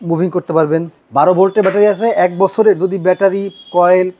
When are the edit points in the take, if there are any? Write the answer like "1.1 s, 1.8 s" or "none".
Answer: 0.9 s